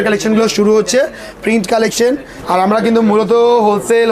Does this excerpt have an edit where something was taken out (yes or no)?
yes